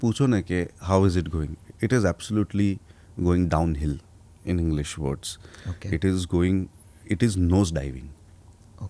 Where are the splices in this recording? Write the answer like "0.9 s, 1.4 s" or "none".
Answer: none